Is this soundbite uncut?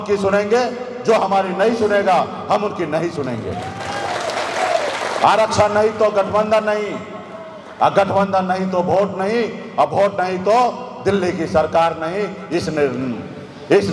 yes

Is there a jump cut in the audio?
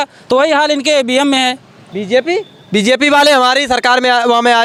no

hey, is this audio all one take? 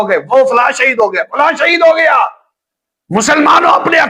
yes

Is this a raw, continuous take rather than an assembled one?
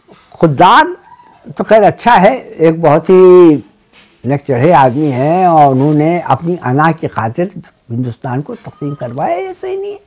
yes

